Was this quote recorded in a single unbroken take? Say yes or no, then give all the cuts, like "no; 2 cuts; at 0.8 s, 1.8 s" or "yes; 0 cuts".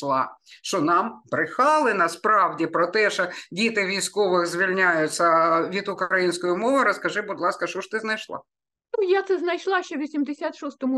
yes; 0 cuts